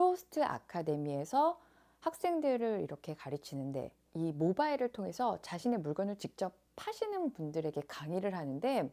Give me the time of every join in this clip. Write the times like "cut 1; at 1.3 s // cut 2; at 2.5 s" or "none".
cut 1; at 4.0 s